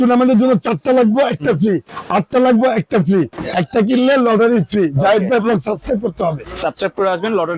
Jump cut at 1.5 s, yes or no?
no